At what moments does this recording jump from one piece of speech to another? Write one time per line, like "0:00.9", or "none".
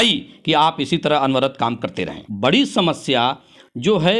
0:02.2